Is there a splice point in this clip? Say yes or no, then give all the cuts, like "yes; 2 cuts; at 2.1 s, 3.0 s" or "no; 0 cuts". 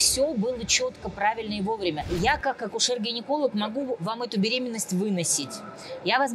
yes; 1 cut; at 2.0 s